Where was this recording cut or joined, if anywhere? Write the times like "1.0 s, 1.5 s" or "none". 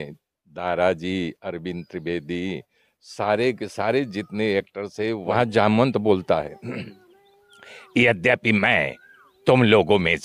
5.3 s